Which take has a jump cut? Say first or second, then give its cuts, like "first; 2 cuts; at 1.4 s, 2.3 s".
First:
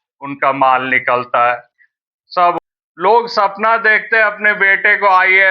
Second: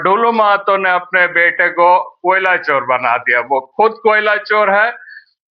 first; 1 cut; at 2.6 s